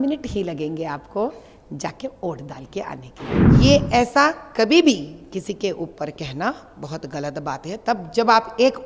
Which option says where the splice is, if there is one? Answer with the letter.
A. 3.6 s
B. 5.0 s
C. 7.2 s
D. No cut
A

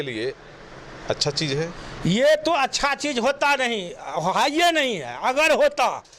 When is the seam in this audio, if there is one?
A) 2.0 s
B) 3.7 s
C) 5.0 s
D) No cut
D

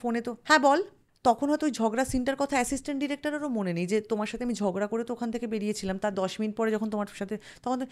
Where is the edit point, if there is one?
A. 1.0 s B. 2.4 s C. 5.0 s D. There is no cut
A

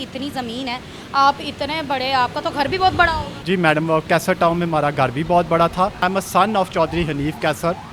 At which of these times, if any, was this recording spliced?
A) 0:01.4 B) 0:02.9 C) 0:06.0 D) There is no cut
C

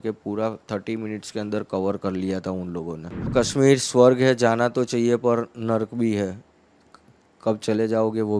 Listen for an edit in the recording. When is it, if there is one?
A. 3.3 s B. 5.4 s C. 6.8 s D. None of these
A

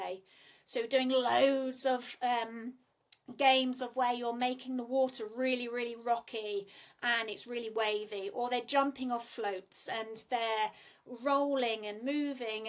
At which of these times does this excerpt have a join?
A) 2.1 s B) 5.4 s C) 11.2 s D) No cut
D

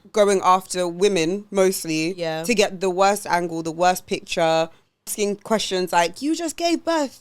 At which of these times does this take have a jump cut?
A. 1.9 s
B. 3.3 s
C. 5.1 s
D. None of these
C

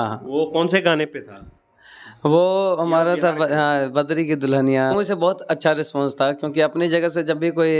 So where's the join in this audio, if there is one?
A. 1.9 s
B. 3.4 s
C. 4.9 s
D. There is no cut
C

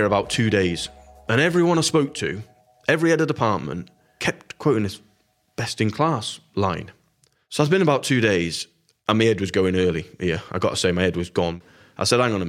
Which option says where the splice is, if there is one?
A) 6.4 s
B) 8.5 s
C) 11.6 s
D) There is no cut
C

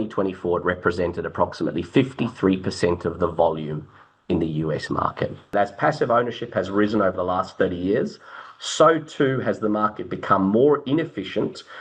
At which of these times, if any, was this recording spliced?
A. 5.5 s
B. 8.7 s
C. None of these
A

